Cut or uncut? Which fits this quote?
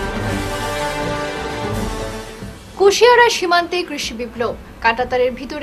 uncut